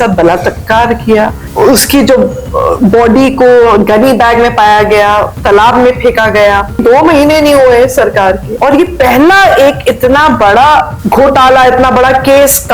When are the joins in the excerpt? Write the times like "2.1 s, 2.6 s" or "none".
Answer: 1.4 s, 6.8 s, 8.5 s, 11.0 s

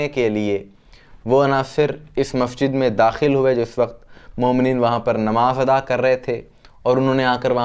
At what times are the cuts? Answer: none

